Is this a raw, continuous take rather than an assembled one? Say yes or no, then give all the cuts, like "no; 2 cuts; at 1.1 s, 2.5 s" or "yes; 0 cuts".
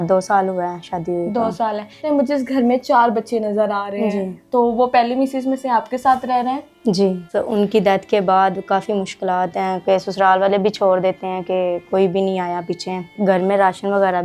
no; 3 cuts; at 2.0 s, 7.2 s, 13.1 s